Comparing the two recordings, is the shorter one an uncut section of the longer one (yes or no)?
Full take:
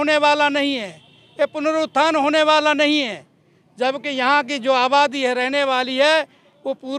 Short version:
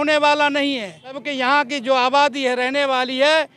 no